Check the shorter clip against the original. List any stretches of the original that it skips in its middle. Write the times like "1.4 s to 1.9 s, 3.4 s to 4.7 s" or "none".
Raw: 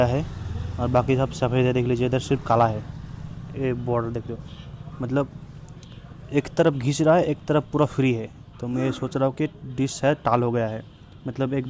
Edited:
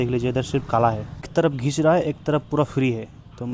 3.0 s to 6.5 s